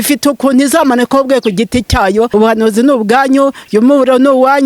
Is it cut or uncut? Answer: cut